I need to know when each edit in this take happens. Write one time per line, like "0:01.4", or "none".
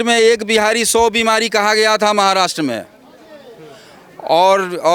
none